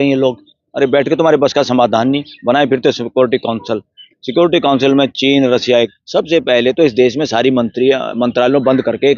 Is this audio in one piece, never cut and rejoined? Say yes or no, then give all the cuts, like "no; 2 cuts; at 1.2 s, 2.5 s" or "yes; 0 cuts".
no; 1 cut; at 5.8 s